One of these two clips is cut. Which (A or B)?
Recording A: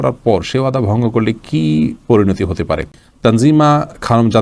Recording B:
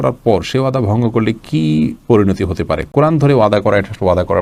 A